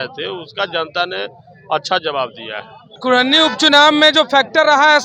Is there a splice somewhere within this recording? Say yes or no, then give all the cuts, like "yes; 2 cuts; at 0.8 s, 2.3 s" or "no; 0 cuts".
yes; 1 cut; at 3.0 s